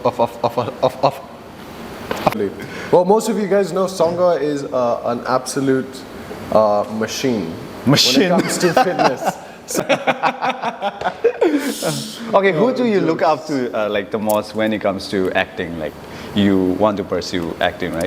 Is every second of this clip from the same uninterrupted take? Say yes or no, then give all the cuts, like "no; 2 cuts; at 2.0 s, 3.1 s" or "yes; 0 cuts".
no; 2 cuts; at 2.3 s, 9.8 s